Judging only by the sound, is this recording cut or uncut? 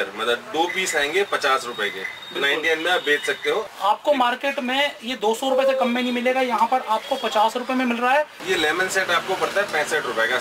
cut